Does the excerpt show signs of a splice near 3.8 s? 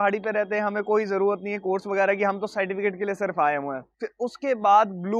yes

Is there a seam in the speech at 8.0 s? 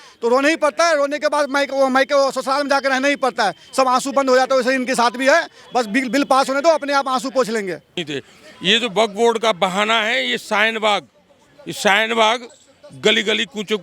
yes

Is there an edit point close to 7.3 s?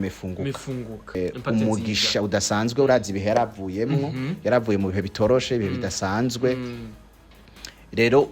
no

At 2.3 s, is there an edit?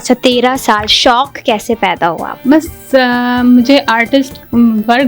yes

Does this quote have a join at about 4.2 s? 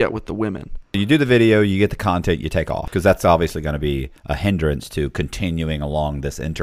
no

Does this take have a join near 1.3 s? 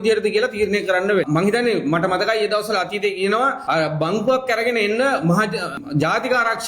yes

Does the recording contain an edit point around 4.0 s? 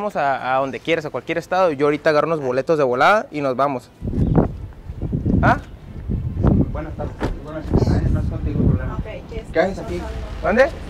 yes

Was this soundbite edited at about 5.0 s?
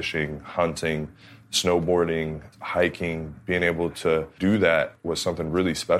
yes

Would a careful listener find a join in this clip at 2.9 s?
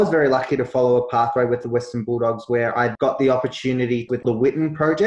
yes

